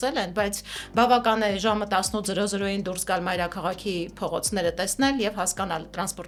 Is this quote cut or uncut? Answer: uncut